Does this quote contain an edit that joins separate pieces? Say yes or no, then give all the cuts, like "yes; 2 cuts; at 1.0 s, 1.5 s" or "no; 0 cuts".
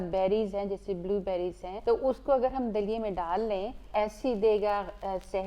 yes; 2 cuts; at 1.7 s, 3.8 s